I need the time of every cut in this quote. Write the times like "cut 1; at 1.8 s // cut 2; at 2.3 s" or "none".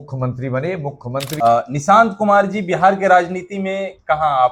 cut 1; at 1.3 s